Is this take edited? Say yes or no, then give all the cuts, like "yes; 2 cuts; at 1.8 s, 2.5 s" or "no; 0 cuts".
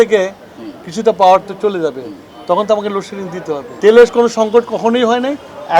yes; 1 cut; at 3.7 s